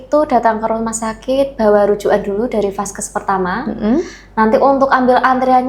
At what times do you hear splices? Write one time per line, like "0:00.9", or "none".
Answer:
none